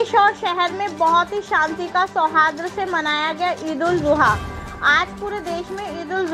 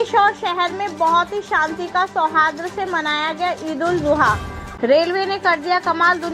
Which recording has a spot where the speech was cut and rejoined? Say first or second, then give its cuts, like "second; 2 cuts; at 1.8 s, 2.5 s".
second; 1 cut; at 4.6 s